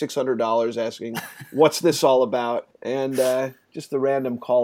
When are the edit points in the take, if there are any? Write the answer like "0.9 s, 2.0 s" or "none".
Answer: 2.7 s